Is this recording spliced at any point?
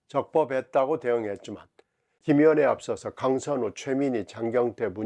yes; 1 cut; at 2.1 s

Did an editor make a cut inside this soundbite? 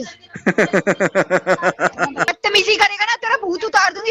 yes; 1 cut; at 2.3 s

